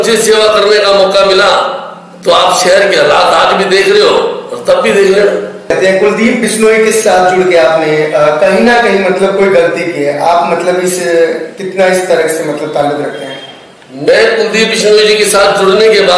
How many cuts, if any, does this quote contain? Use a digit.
1